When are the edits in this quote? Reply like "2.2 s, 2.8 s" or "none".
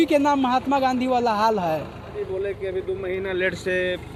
none

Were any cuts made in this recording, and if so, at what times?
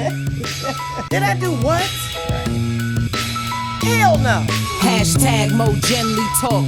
4.5 s

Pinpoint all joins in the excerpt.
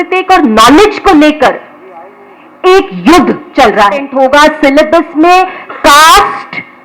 4.1 s

